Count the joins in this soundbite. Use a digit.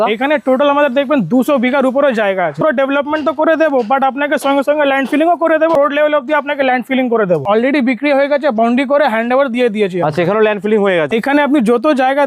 4